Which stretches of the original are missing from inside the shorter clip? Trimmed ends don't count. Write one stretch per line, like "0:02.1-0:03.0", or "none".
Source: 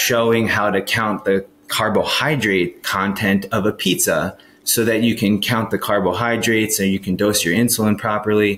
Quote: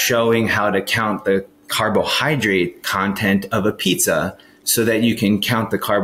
none